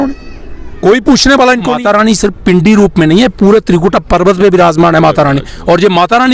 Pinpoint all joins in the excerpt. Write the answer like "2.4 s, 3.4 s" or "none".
1.7 s